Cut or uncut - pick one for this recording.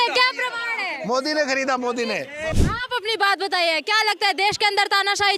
cut